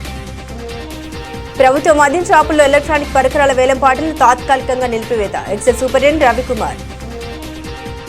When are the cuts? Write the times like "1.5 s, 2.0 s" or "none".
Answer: 1.0 s, 6.8 s

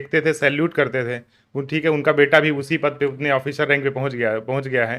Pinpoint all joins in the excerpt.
none

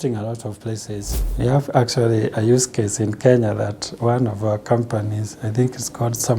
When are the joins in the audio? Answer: 1.2 s

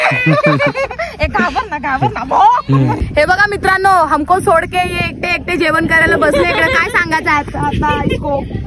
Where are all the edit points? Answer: 3.0 s

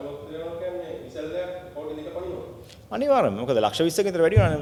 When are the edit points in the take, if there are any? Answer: none

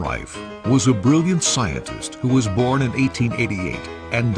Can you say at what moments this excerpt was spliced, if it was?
1.3 s

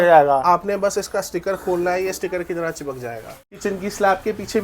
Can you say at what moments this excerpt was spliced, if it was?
3.5 s

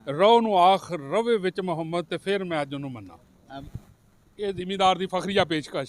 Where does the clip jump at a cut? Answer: 3.6 s

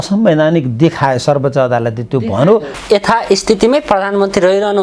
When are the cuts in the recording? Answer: 2.7 s

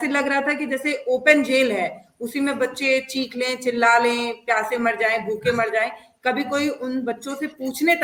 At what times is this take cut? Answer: none

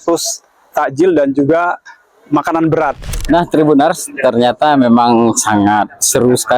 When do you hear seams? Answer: 3.0 s

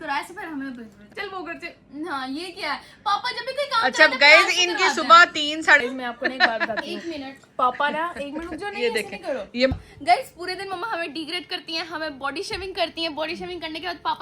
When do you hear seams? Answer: 1.1 s, 5.8 s, 9.7 s

